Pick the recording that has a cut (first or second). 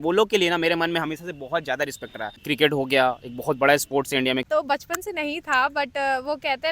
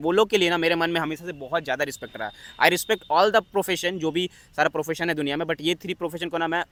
first